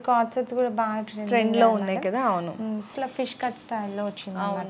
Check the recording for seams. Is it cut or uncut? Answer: cut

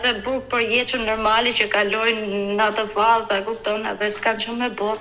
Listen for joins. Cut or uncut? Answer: uncut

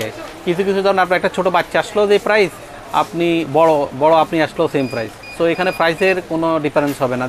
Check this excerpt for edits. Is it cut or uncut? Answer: uncut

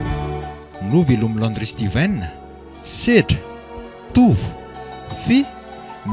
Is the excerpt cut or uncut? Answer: uncut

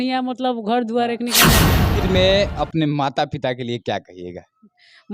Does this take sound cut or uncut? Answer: cut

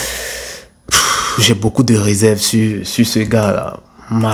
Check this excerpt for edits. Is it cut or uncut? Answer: uncut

